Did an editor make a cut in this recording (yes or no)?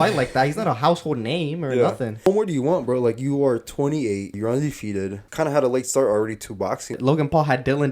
yes